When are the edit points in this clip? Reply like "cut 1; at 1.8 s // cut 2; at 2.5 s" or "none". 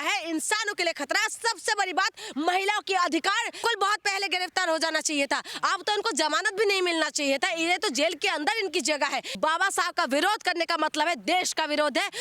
cut 1; at 3.6 s // cut 2; at 9.4 s